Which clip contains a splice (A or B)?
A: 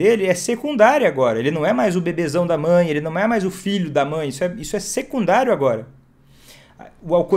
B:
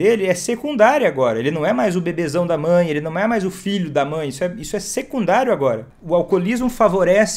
B